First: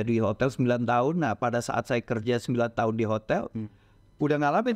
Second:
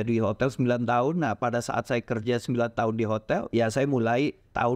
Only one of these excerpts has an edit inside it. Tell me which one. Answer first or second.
second